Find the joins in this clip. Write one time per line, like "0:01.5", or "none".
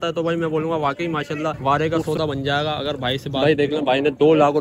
0:01.6
0:03.3